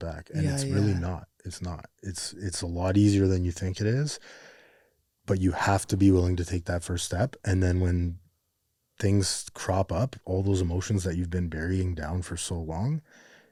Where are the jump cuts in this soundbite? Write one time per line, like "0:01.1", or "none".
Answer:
none